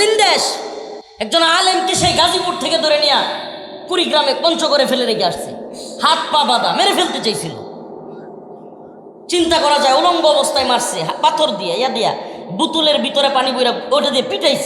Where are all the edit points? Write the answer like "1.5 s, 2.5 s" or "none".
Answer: none